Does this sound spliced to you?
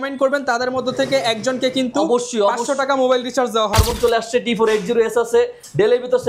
yes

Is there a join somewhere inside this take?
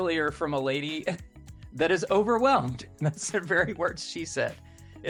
no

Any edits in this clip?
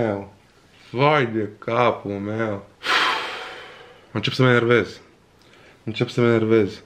yes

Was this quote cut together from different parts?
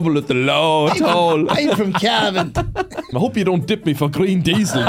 yes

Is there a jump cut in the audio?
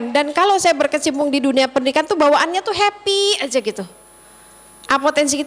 no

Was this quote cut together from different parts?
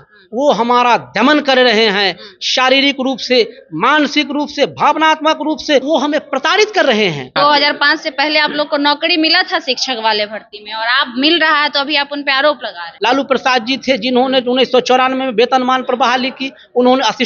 yes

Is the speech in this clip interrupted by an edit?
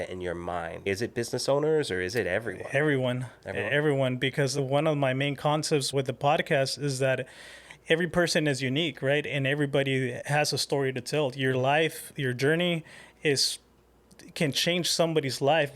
yes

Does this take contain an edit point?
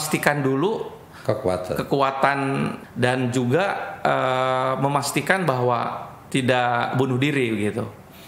yes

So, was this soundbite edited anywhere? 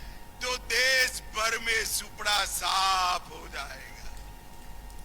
no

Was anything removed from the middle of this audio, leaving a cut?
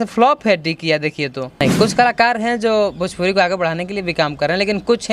yes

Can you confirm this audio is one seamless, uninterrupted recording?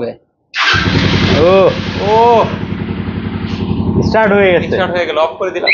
yes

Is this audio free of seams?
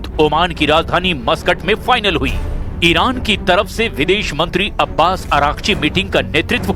yes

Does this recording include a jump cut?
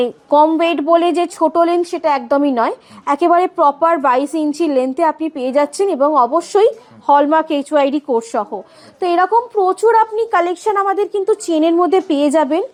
no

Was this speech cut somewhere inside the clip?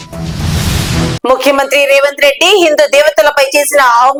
no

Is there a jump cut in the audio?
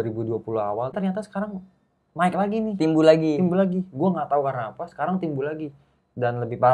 yes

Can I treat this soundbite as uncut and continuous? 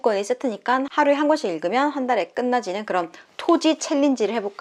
yes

